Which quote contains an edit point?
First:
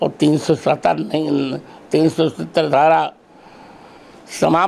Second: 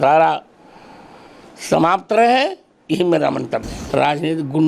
second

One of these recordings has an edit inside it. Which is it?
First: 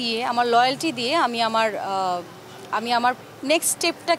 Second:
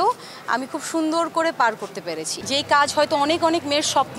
second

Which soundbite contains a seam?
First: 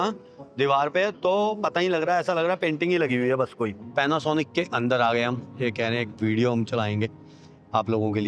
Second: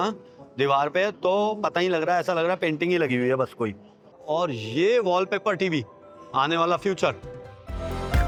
first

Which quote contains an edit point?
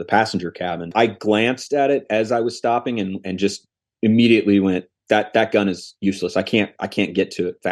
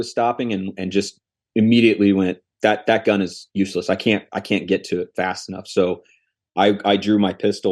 first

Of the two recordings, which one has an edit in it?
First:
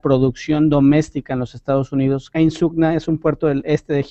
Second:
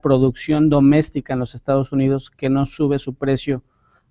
second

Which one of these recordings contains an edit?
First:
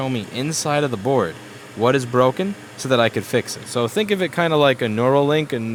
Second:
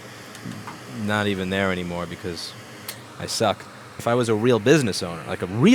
second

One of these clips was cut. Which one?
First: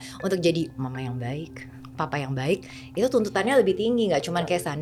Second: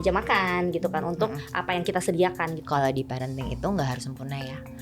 second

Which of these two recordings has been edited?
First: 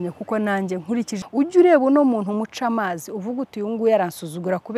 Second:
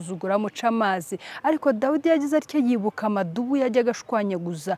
first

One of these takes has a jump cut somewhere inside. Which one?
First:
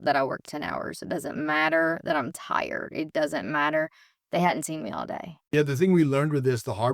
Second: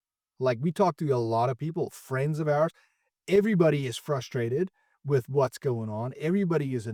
first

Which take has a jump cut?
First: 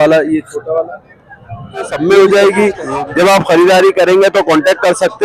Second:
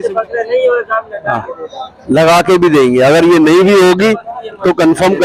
first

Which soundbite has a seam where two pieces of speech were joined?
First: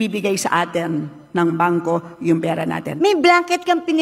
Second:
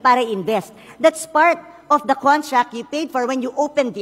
first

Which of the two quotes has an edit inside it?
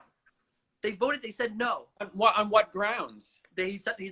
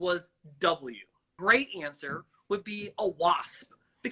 second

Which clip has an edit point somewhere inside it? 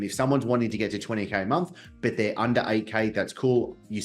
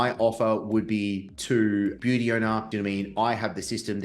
second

